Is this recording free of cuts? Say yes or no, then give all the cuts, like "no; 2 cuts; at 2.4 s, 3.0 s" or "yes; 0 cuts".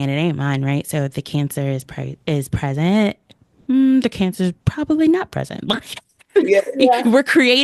yes; 0 cuts